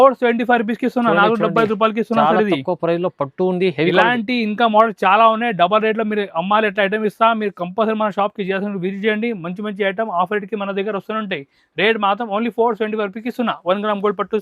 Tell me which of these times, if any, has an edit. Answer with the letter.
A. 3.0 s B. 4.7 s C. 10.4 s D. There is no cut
D